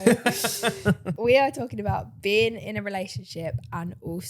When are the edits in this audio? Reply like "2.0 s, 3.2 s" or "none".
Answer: 1.1 s